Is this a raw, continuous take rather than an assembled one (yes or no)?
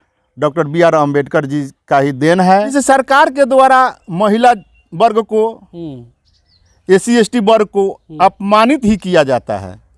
no